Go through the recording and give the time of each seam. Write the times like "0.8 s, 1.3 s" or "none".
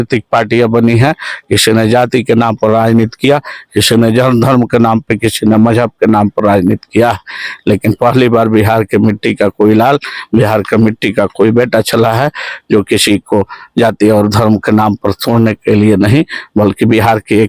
none